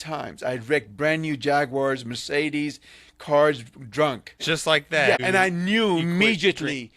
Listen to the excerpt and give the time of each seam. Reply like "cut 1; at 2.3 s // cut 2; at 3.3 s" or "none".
cut 1; at 4.3 s // cut 2; at 5.2 s